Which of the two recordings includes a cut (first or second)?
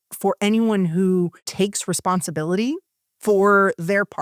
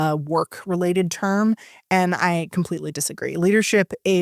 first